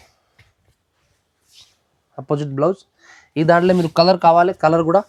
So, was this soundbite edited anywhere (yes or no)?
no